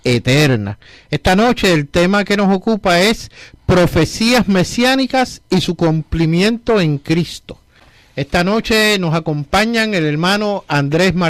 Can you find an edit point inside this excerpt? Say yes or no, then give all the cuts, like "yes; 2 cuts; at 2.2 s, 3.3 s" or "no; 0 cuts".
no; 0 cuts